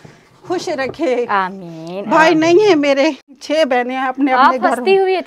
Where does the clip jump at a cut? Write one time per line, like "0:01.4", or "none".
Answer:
0:03.4

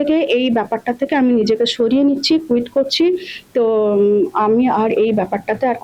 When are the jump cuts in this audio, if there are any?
none

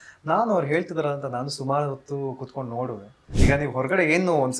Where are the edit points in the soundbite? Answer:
0:03.3

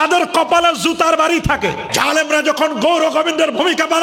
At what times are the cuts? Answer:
0:01.9

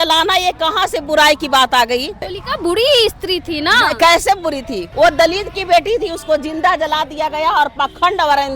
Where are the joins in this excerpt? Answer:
0:02.3
0:04.8

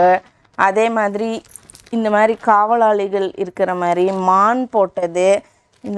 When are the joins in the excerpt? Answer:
none

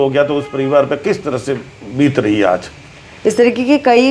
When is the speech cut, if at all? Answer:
none

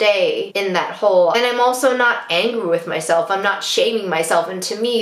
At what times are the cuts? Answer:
0:01.3

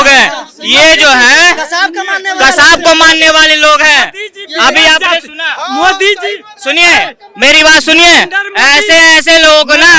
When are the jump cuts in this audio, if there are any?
none

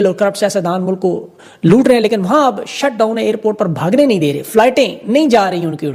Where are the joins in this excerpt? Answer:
0:04.8

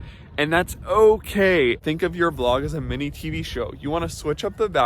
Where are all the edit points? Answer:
0:01.8

